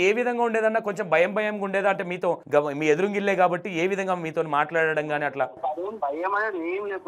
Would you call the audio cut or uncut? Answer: cut